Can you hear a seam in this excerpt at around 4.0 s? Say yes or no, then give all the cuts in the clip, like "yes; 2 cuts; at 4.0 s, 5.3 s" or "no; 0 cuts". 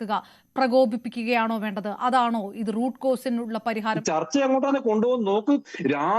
yes; 1 cut; at 4.0 s